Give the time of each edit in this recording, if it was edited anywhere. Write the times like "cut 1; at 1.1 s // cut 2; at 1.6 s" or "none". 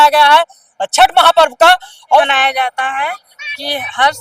cut 1; at 2.2 s